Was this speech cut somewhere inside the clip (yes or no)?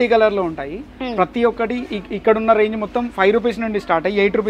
no